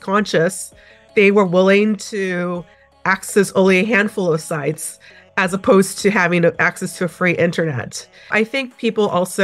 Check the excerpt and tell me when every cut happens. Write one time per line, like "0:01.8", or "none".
0:08.3